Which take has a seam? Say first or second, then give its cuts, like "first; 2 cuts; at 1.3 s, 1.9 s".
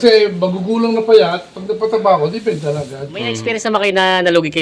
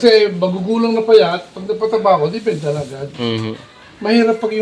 first; 1 cut; at 3.6 s